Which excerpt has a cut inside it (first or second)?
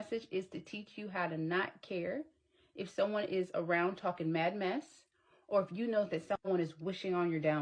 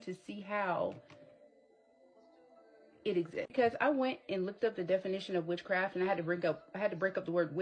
second